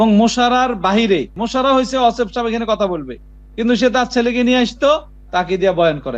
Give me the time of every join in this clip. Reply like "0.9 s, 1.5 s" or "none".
1.4 s